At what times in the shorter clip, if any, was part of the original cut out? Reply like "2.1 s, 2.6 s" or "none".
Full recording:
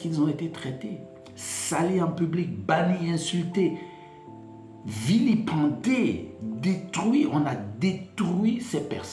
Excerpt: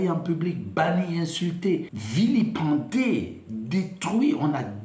2.0 s